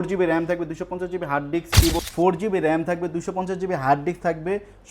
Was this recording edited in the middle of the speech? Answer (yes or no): yes